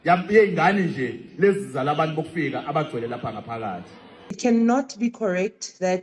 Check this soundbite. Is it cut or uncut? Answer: cut